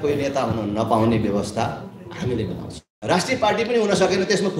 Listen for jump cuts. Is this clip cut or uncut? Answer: cut